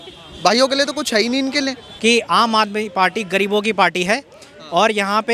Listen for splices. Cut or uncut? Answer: cut